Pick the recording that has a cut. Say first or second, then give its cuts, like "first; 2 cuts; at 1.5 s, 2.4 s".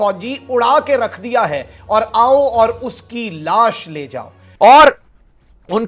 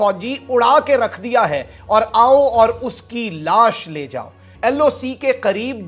first; 1 cut; at 4.4 s